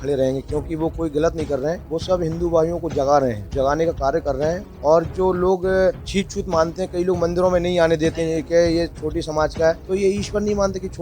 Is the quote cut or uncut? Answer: cut